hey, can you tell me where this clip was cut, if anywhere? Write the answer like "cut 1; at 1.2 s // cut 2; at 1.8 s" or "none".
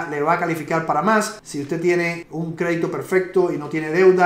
none

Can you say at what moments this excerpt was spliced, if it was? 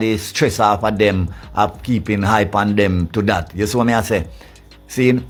none

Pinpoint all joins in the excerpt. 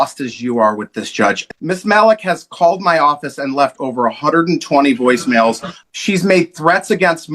cut 1; at 1.5 s // cut 2; at 5.7 s

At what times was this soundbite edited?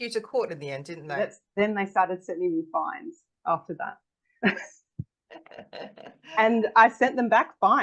cut 1; at 1.1 s

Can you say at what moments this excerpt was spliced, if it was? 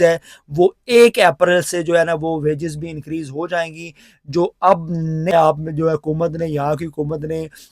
cut 1; at 5.3 s

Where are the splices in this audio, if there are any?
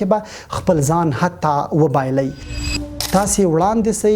cut 1; at 2.6 s

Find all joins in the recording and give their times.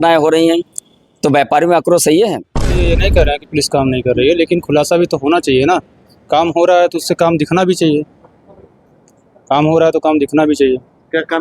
cut 1; at 2.8 s

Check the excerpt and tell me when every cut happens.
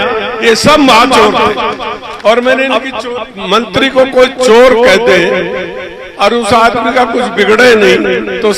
cut 1; at 2.8 s

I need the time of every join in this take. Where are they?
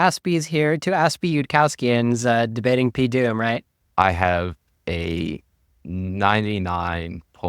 cut 1; at 3.7 s

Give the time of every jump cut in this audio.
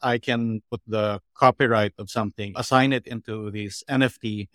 cut 1; at 2.6 s

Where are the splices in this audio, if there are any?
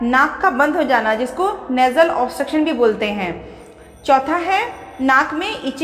cut 1; at 4.8 s

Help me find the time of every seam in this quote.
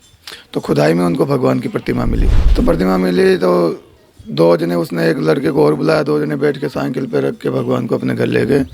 cut 1; at 2.4 s

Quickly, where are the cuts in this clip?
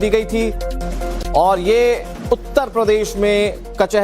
cut 1; at 2.1 s

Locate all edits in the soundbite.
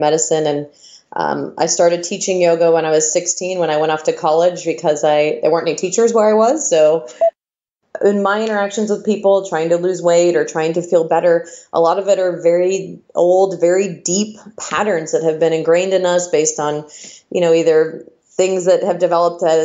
cut 1; at 7.3 s // cut 2; at 14.5 s

